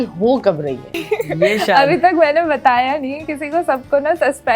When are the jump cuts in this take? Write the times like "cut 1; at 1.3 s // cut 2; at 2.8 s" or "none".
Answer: cut 1; at 1.0 s